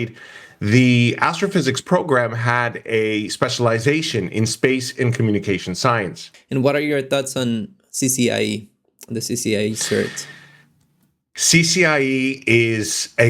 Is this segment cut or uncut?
cut